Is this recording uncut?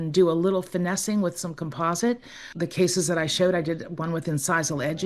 no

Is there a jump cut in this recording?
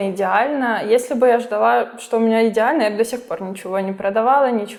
no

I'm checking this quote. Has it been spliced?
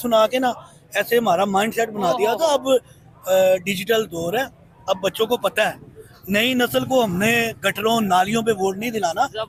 no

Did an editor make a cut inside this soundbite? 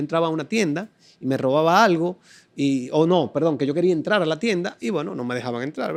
no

